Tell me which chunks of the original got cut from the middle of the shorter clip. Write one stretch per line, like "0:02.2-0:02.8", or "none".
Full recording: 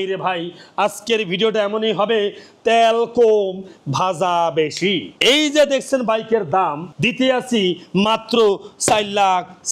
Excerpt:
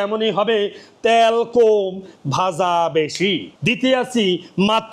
0:05.1-0:06.9